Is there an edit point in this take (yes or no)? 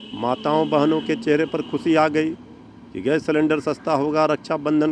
no